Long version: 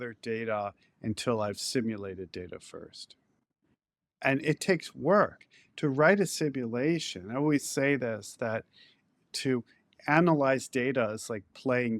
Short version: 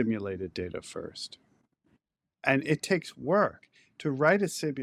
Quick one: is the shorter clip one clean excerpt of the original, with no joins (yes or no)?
yes